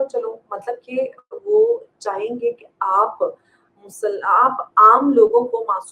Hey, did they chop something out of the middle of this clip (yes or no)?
no